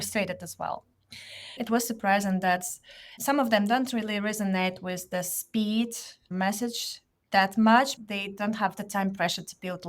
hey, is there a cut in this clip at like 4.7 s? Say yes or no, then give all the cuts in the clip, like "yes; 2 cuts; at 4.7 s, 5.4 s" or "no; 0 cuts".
no; 3 cuts; at 1.6 s, 3.1 s, 8.0 s